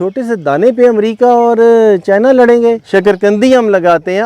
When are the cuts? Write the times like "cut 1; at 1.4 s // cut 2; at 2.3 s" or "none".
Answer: cut 1; at 2.8 s

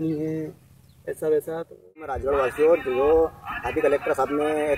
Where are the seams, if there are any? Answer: cut 1; at 2.2 s

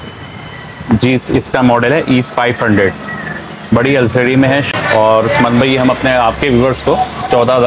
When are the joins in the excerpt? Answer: cut 1; at 4.7 s

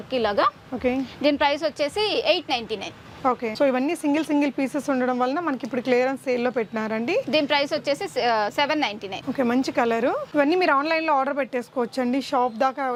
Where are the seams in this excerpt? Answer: none

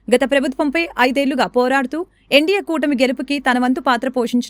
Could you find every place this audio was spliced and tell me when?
none

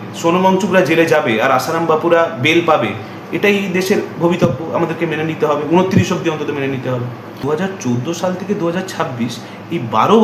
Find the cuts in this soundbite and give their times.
cut 1; at 7.4 s

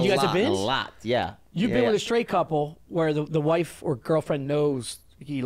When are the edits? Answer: none

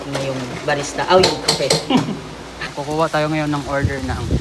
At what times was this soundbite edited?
cut 1; at 2.7 s

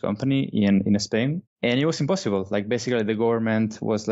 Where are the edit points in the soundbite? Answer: cut 1; at 1.4 s

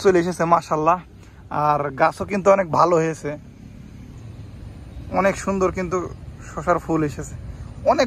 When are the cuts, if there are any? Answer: none

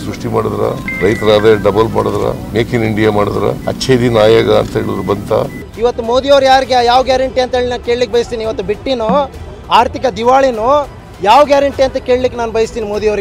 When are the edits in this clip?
cut 1; at 0.9 s // cut 2; at 2.4 s // cut 3; at 3.6 s // cut 4; at 5.6 s

